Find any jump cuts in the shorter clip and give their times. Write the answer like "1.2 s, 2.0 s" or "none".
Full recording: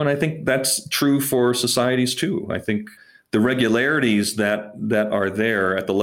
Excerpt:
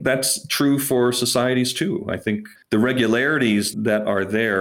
2.5 s, 3.7 s